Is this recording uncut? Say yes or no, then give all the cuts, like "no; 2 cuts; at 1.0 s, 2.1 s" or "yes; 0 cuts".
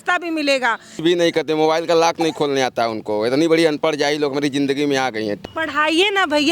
no; 2 cuts; at 1.0 s, 5.4 s